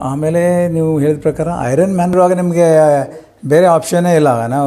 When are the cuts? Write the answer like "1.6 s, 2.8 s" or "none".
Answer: 2.1 s